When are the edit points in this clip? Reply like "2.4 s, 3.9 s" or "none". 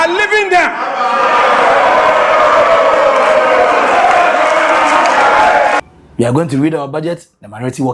5.8 s